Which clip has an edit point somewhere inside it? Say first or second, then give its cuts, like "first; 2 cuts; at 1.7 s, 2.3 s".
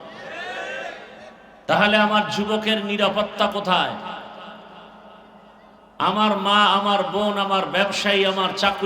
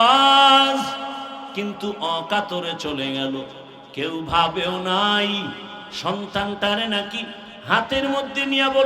first; 1 cut; at 1.5 s